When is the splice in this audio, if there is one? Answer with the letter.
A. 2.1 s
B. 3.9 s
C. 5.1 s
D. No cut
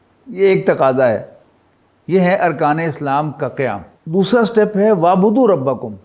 B